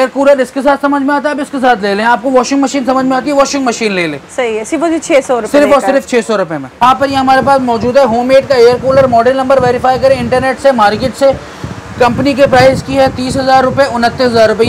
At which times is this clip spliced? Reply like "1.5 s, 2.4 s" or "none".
none